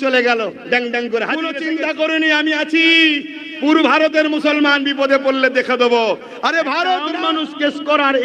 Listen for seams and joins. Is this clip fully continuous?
no; 2 cuts; at 1.6 s, 7.1 s

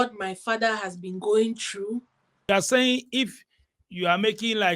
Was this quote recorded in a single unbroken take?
no; 1 cut; at 2.5 s

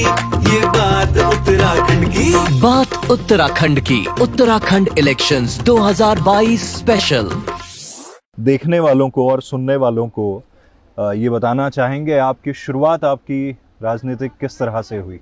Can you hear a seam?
no; 0 cuts

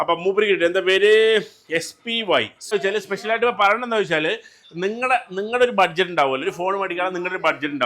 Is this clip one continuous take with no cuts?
no; 1 cut; at 2.7 s

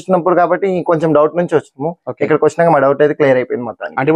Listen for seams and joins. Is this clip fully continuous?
yes; 0 cuts

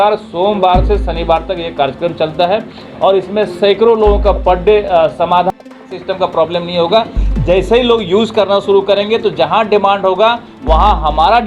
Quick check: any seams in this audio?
yes; 1 cut; at 5.5 s

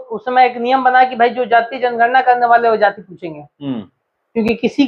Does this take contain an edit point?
no; 0 cuts

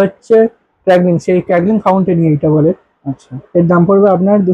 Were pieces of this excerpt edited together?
no; 0 cuts

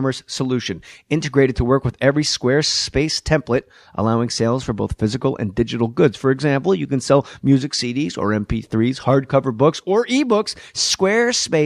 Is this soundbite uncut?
no; 1 cut; at 8.1 s

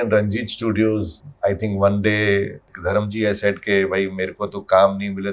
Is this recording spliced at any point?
yes; 2 cuts; at 1.2 s, 2.7 s

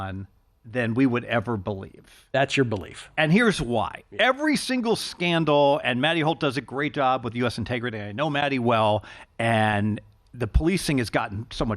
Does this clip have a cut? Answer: no; 0 cuts

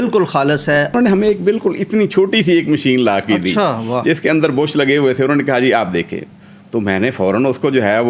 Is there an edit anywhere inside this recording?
yes; 1 cut; at 0.9 s

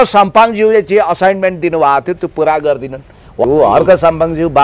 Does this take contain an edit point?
yes; 1 cut; at 3.4 s

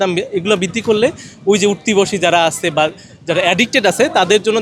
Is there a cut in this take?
no; 0 cuts

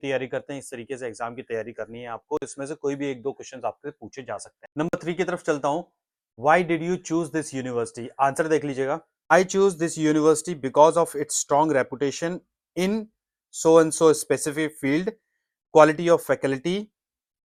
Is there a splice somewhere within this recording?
no; 0 cuts

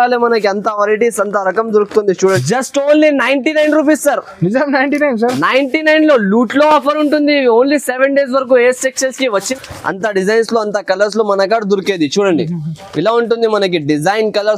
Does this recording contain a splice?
yes; 2 cuts; at 2.4 s, 9.5 s

